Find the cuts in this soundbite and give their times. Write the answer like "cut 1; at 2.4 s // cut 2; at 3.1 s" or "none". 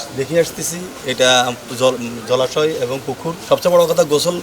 cut 1; at 3.3 s